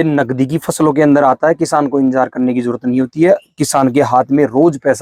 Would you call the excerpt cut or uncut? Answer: uncut